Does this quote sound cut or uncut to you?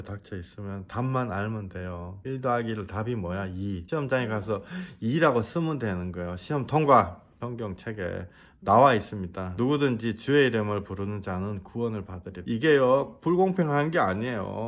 cut